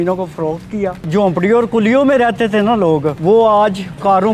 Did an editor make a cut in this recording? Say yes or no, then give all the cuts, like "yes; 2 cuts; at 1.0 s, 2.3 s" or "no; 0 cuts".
yes; 2 cuts; at 1.0 s, 3.1 s